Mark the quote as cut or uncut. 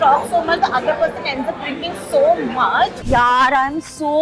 cut